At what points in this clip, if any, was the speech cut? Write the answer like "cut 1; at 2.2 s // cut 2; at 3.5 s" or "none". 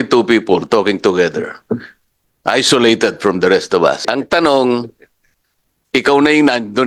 cut 1; at 4.1 s